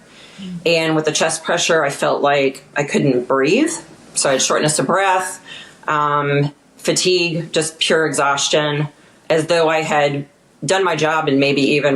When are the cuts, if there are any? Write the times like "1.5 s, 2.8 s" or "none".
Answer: none

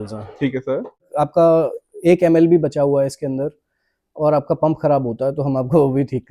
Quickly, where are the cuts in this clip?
1.1 s

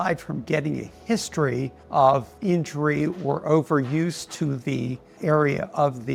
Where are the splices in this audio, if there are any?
none

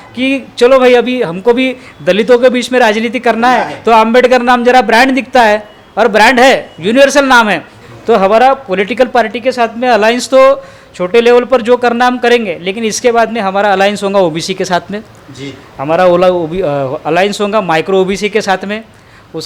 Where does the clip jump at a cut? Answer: 7.7 s

